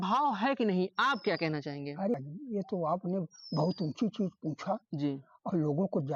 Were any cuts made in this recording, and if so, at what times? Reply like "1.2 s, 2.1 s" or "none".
none